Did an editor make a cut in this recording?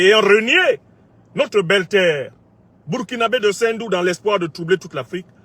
no; 0 cuts

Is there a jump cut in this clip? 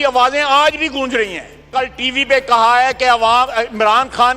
yes; 1 cut; at 1.6 s

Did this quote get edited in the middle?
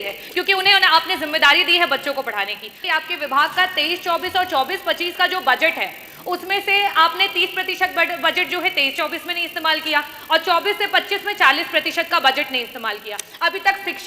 yes; 1 cut; at 2.8 s

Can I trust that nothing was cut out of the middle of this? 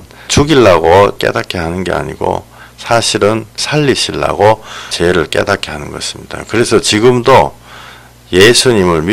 no; 1 cut; at 1.2 s

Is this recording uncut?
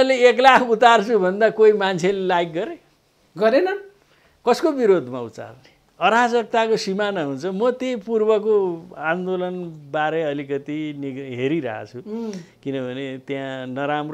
yes; 0 cuts

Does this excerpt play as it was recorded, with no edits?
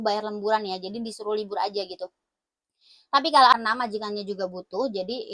no; 1 cut; at 3.5 s

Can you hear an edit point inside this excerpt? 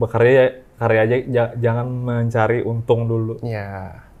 no; 0 cuts

